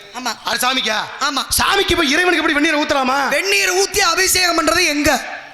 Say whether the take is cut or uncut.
uncut